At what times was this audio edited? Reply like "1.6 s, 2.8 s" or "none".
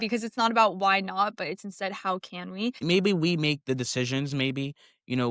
2.8 s

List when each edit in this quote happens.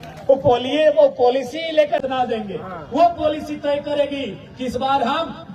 2.0 s

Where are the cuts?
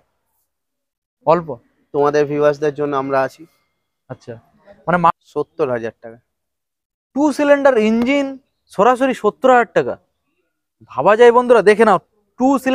5.1 s

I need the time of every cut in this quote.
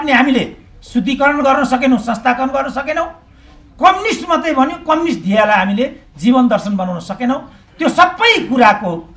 none

